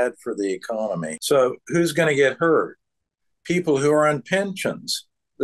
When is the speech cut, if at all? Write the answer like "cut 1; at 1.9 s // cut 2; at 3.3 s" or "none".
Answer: cut 1; at 1.1 s